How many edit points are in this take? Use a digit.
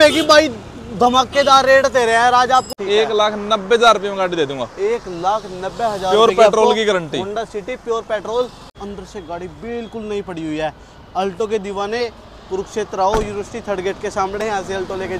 2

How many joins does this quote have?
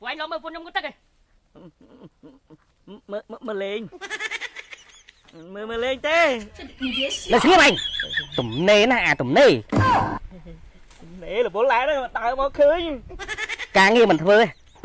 2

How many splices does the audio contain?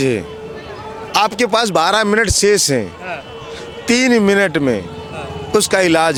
0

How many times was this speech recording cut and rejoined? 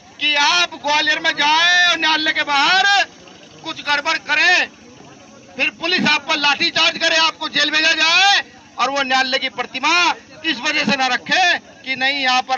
0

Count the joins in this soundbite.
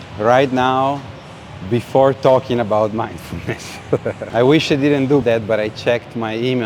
2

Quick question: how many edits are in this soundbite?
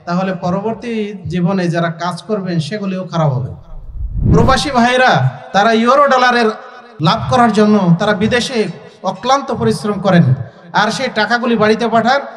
1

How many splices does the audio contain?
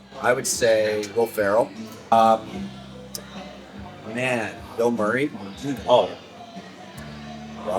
1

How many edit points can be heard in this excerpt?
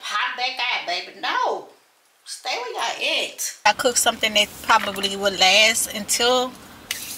1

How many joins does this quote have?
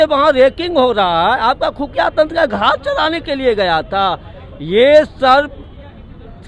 0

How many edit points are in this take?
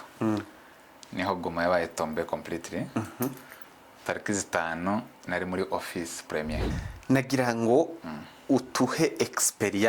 1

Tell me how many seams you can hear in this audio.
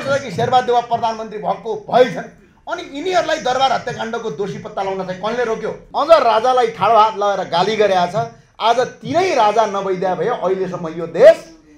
1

